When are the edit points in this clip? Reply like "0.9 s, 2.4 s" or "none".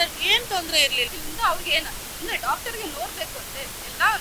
1.1 s